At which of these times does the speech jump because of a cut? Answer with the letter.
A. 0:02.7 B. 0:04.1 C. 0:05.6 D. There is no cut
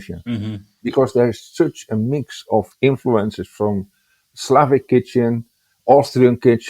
A